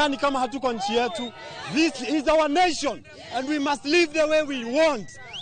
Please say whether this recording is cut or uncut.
uncut